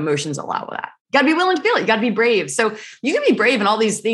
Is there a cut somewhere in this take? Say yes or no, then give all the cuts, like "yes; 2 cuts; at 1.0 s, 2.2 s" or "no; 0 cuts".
yes; 1 cut; at 0.9 s